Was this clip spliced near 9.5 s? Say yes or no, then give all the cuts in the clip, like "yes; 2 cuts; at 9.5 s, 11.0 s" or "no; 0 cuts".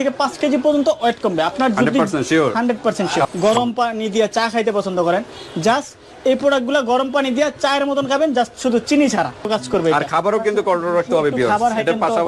yes; 2 cuts; at 3.3 s, 9.5 s